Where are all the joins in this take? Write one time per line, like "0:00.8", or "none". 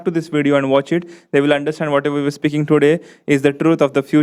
none